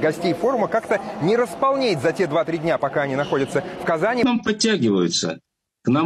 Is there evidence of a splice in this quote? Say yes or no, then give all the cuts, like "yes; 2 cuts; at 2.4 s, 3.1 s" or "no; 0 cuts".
yes; 1 cut; at 4.2 s